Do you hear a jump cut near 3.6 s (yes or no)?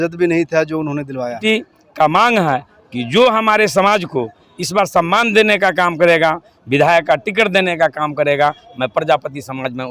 no